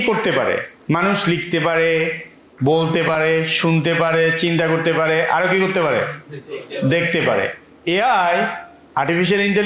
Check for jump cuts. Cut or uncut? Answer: uncut